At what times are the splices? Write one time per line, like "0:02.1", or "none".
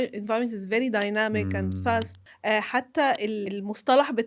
0:02.2
0:03.5